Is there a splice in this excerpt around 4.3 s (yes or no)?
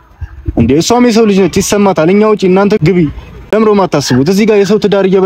no